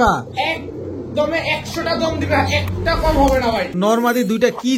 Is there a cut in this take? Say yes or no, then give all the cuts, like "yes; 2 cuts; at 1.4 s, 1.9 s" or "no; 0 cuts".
yes; 1 cut; at 3.7 s